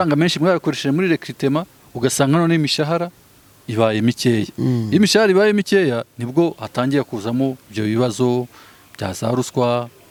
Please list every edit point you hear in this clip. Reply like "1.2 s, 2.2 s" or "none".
none